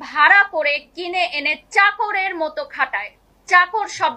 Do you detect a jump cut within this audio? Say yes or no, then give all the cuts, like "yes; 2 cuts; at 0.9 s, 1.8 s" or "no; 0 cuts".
no; 0 cuts